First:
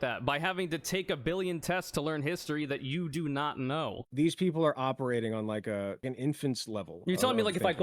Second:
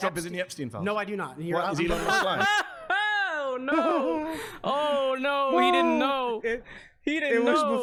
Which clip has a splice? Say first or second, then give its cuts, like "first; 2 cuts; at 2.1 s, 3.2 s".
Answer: first; 2 cuts; at 4.0 s, 6.0 s